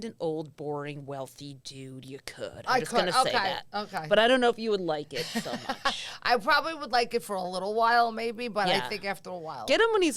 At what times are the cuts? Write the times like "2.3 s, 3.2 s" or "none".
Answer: none